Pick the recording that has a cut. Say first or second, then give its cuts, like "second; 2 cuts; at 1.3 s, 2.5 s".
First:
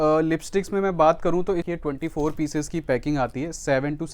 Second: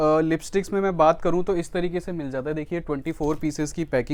first; 1 cut; at 1.7 s